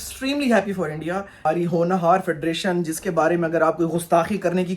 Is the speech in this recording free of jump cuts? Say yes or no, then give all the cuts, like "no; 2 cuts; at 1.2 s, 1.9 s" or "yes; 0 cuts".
no; 1 cut; at 1.3 s